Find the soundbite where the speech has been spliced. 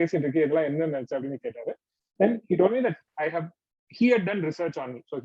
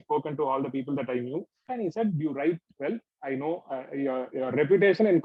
second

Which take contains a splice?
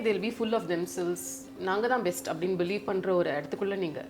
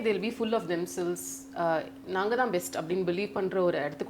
first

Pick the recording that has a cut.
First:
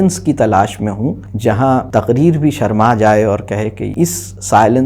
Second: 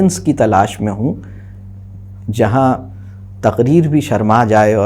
first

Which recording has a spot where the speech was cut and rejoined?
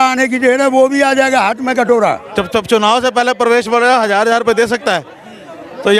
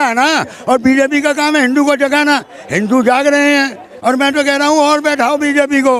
first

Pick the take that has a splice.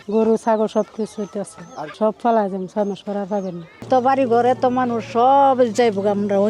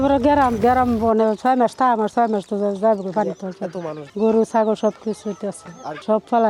first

